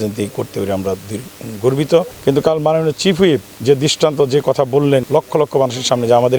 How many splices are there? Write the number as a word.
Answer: two